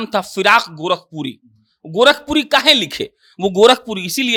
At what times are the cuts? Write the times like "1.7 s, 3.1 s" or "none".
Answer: none